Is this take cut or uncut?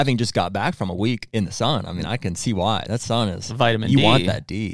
cut